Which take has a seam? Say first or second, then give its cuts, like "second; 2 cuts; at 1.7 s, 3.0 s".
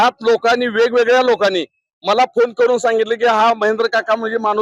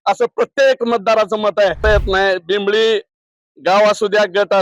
second; 1 cut; at 1.8 s